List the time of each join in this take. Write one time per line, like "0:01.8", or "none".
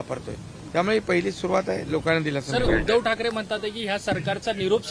0:02.7